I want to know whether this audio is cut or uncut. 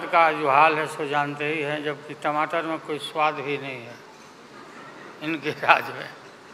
uncut